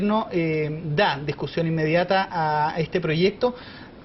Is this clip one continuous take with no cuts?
yes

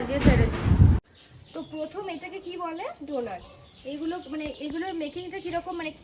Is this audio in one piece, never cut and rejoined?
no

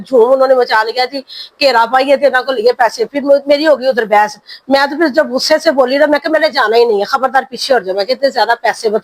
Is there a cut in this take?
no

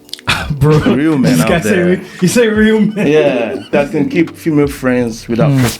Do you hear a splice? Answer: yes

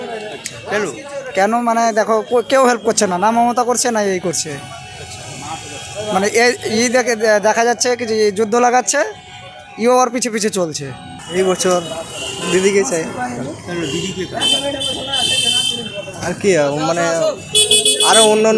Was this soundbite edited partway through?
yes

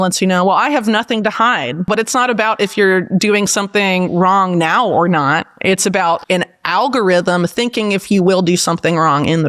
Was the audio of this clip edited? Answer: yes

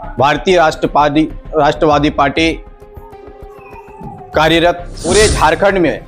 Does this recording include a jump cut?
yes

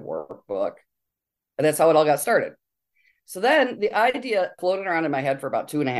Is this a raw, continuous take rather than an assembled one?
no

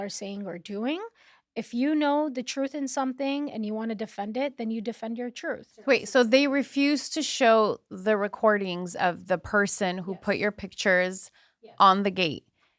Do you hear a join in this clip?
yes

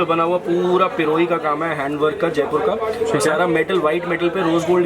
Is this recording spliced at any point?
no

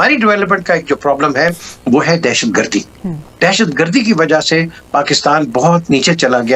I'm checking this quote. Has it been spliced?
no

